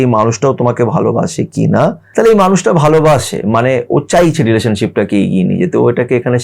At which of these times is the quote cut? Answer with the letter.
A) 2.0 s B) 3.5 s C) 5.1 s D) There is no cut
A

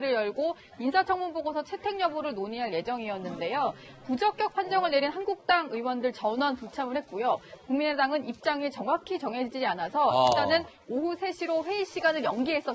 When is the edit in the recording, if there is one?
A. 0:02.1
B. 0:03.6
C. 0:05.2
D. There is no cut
A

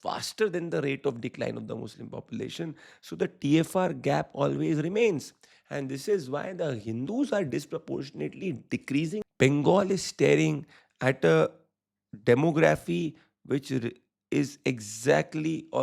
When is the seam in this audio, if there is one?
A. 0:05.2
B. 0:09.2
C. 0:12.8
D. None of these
B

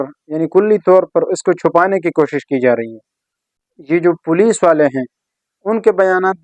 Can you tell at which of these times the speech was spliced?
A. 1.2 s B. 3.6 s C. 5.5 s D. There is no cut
B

